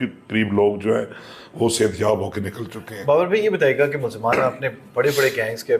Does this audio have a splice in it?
no; 0 cuts

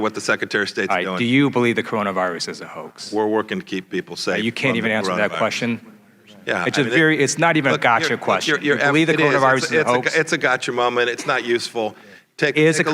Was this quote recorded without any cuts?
yes; 0 cuts

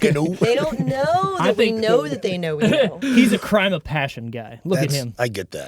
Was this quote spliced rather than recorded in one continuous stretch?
yes; 1 cut; at 3.0 s

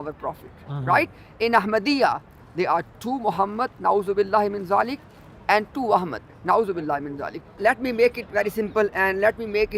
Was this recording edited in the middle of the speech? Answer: yes; 1 cut; at 7.6 s

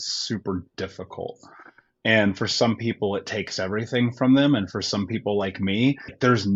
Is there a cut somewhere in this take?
no; 0 cuts

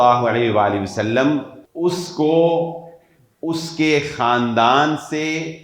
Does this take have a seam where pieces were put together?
yes; 1 cut; at 1.6 s

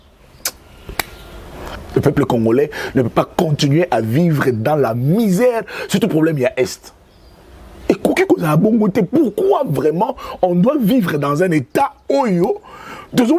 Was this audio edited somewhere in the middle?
yes; 1 cut; at 1.7 s

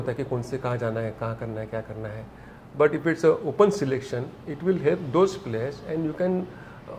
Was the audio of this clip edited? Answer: no; 0 cuts

